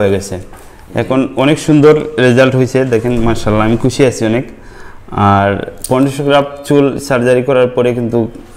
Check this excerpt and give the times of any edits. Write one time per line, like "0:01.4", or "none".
none